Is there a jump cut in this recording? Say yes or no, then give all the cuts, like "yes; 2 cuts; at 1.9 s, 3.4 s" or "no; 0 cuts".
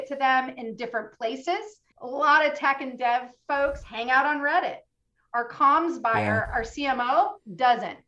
yes; 1 cut; at 1.8 s